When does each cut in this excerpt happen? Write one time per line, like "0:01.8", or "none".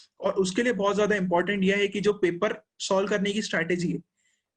none